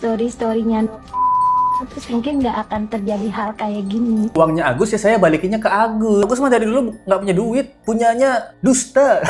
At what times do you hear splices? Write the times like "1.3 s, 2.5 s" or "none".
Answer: 4.3 s, 6.2 s